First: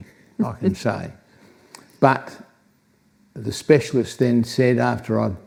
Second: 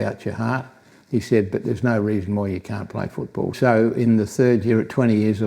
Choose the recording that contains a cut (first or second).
second